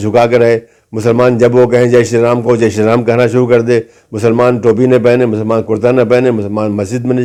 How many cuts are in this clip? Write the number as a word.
zero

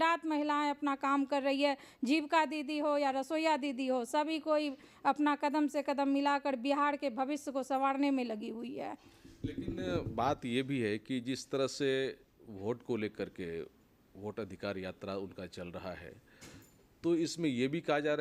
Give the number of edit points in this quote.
zero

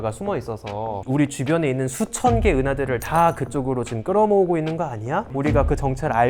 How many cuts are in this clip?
one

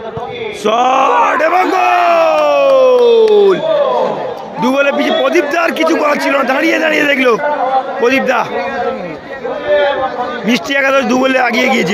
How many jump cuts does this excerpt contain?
zero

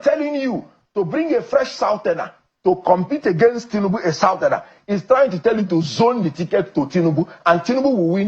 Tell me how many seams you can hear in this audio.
zero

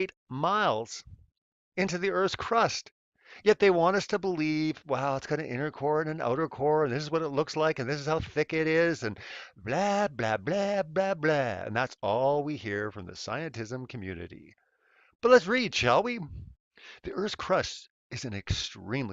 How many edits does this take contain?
one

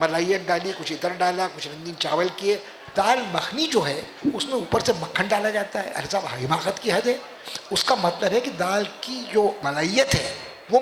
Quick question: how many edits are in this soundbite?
two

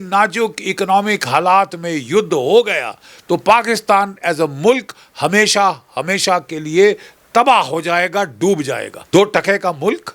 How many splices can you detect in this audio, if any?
one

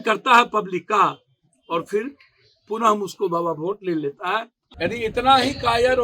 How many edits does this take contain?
one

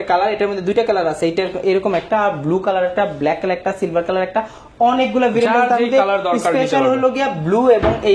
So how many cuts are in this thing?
zero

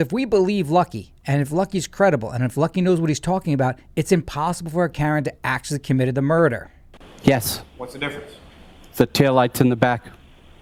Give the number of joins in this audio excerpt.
zero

